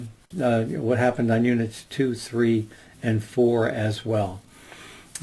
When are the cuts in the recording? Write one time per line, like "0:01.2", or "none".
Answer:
none